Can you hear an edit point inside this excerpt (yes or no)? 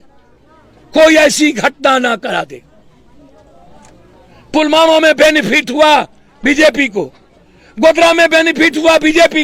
no